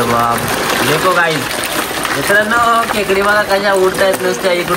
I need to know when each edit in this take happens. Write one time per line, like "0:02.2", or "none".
0:01.5